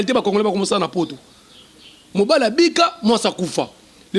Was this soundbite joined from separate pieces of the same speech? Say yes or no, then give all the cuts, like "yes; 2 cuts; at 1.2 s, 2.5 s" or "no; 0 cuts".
no; 0 cuts